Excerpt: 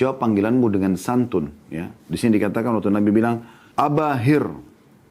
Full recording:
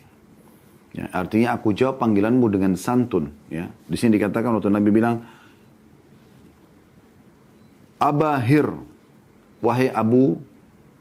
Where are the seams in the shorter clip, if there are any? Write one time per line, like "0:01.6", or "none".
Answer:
0:03.6

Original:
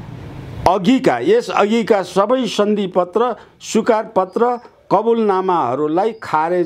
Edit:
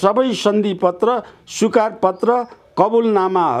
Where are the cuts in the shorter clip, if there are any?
none

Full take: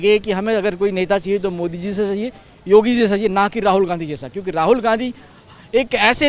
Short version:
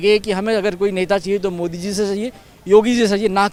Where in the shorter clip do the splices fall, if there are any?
none

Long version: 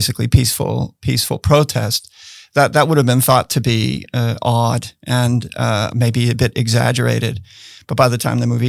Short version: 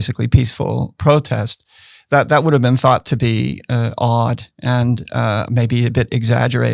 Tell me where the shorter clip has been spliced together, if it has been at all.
0:01.0

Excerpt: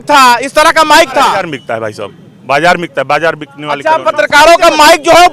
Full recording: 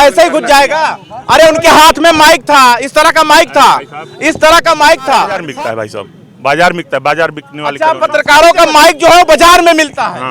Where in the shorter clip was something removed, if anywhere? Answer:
0:01.5

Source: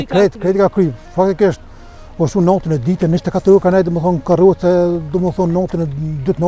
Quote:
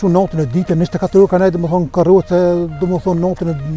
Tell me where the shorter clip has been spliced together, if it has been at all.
none

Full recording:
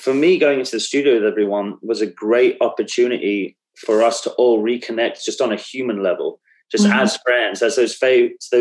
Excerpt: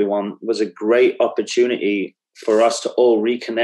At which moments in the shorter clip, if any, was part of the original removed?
none

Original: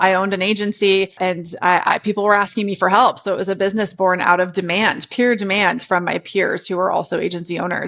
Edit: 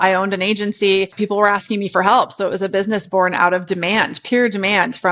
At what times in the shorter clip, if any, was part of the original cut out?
0:01.1

